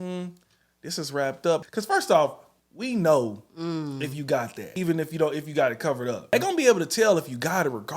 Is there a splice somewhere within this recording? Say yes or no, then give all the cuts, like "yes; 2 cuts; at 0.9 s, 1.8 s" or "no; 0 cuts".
yes; 3 cuts; at 1.7 s, 4.6 s, 6.3 s